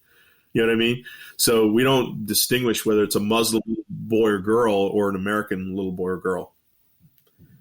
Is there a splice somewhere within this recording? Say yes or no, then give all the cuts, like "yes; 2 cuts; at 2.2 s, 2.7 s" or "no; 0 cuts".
yes; 1 cut; at 2.3 s